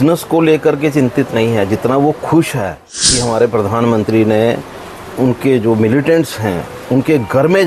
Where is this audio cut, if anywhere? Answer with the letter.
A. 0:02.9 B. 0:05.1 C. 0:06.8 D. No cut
A